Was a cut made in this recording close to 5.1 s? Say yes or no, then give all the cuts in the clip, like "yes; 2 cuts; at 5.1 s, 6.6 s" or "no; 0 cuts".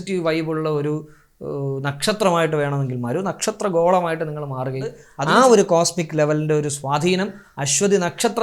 yes; 1 cut; at 5.1 s